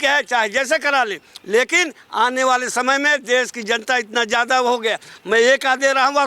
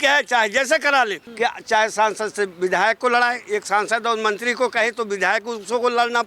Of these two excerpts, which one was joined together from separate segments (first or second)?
second